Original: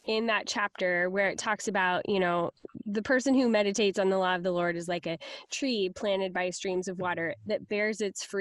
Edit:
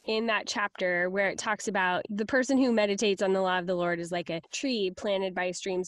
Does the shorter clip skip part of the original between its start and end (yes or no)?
yes